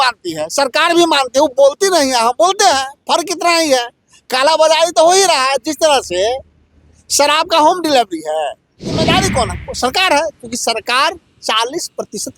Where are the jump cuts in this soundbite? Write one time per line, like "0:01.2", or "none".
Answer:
0:09.0